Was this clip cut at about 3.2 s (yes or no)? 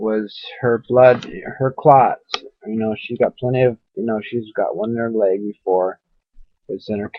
yes